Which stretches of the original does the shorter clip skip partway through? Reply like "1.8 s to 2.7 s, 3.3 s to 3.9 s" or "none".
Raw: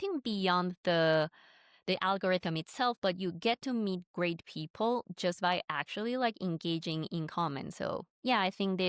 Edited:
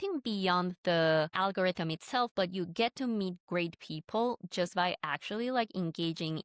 1.3 s to 2.0 s